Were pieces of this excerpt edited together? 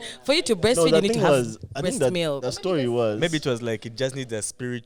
no; 0 cuts

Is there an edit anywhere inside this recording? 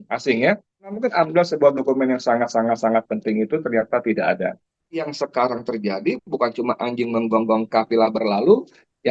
yes; 2 cuts; at 0.9 s, 5.1 s

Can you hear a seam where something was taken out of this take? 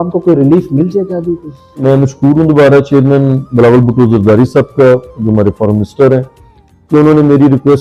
yes; 1 cut; at 1.8 s

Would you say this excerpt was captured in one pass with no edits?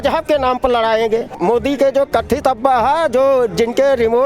no; 1 cut; at 1.4 s

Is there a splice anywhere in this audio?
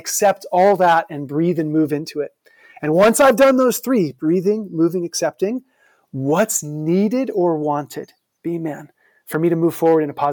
no; 0 cuts

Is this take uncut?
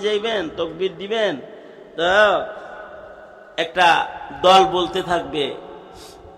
yes; 0 cuts

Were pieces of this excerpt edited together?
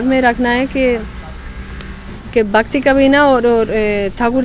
no; 0 cuts

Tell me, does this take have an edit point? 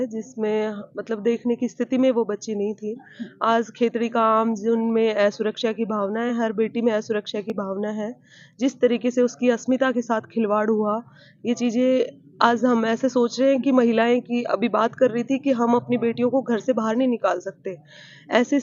no; 0 cuts

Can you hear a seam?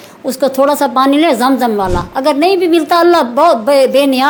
no; 0 cuts

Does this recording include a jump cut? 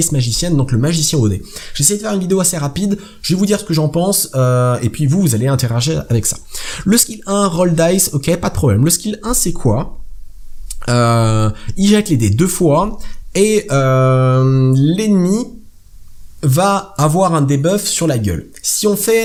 no; 0 cuts

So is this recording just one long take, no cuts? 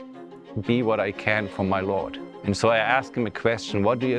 no; 1 cut; at 2.2 s

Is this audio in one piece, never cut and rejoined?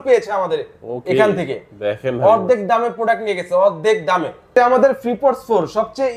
no; 1 cut; at 4.5 s

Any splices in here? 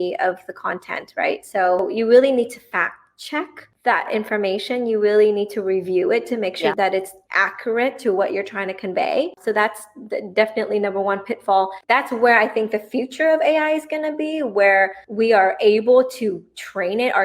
yes; 2 cuts; at 1.8 s, 11.8 s

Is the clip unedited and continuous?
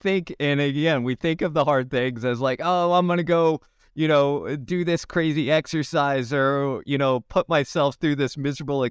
yes; 0 cuts

